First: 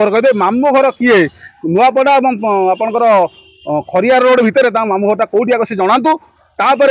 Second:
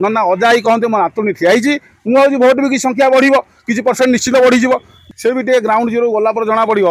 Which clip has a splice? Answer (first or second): second